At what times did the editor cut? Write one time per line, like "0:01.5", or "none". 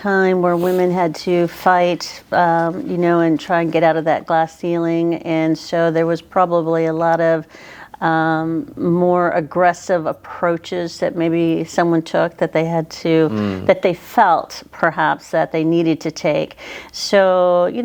none